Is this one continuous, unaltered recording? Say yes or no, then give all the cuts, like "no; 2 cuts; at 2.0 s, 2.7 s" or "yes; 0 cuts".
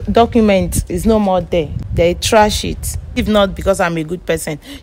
no; 2 cuts; at 1.8 s, 3.2 s